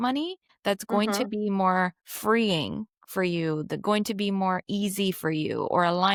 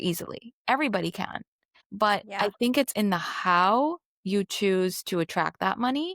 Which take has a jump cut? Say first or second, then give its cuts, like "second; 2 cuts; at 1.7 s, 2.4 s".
second; 1 cut; at 1.7 s